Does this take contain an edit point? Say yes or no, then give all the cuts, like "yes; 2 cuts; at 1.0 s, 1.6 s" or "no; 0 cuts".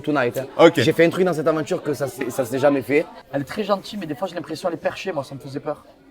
yes; 1 cut; at 3.2 s